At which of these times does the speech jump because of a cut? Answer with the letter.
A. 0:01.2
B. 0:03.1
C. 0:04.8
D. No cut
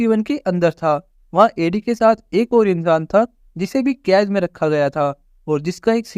D